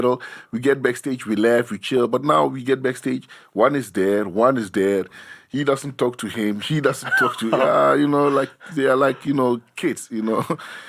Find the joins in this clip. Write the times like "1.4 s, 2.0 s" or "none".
none